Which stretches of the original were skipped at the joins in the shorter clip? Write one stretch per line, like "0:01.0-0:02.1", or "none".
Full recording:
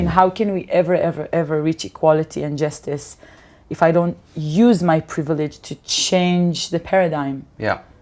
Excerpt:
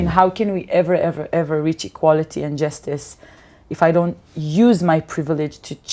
none